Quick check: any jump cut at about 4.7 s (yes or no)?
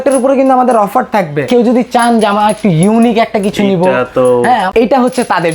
yes